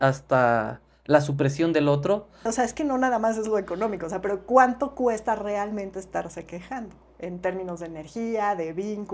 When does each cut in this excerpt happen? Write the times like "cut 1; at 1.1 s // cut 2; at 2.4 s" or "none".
cut 1; at 2.5 s